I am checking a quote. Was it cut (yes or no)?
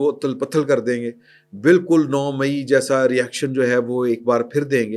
no